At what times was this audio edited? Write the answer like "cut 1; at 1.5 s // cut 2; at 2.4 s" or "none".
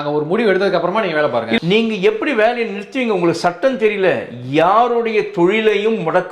cut 1; at 1.6 s